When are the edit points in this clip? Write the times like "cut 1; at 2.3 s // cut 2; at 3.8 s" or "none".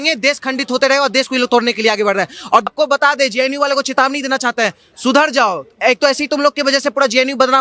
cut 1; at 2.7 s